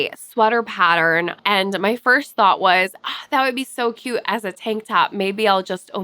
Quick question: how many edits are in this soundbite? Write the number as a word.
one